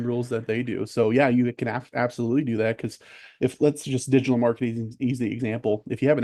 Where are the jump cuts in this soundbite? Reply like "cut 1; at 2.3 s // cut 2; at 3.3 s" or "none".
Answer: none